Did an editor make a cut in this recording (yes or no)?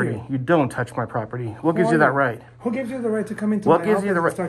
no